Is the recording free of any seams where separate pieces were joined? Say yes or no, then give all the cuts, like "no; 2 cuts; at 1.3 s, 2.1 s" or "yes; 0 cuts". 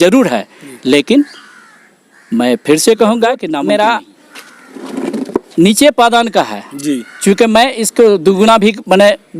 no; 1 cut; at 3.5 s